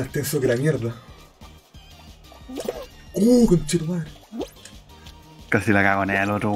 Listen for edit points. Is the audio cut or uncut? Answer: uncut